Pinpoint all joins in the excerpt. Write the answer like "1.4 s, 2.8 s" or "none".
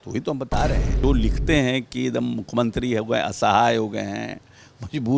1.0 s